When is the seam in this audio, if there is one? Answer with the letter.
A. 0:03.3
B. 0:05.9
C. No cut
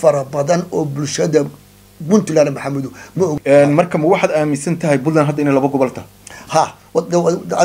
A